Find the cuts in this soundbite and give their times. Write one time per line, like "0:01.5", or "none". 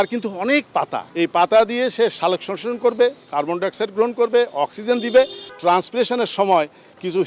0:01.0
0:05.4